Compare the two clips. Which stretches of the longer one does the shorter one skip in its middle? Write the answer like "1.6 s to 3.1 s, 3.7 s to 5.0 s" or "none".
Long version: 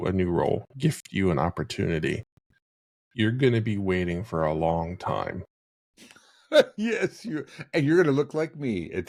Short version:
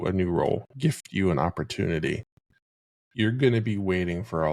none